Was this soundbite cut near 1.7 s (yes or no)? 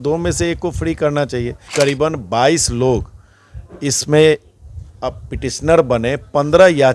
yes